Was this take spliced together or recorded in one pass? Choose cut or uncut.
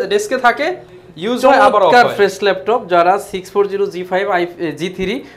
uncut